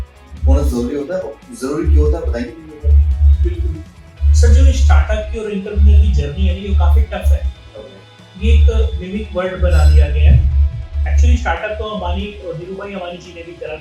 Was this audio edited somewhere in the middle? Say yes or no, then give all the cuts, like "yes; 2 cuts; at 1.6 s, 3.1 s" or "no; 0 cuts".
no; 0 cuts